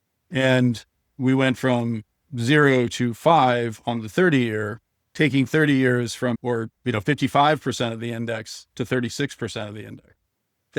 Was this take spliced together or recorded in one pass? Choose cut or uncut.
cut